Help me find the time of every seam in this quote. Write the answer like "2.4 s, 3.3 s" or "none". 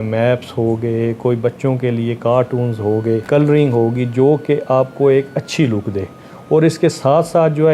3.2 s